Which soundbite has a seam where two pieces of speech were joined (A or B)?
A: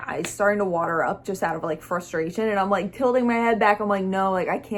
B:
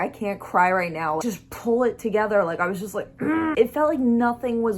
B